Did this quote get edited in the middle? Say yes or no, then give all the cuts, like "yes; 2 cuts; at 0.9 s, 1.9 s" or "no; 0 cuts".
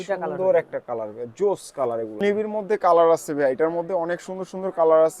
yes; 1 cut; at 2.2 s